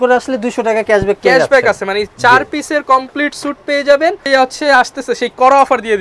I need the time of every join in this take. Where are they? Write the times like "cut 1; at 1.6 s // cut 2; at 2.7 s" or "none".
cut 1; at 4.2 s

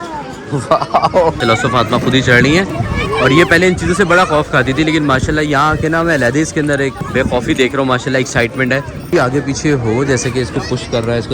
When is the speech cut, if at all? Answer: cut 1; at 1.4 s // cut 2; at 7.0 s // cut 3; at 9.0 s

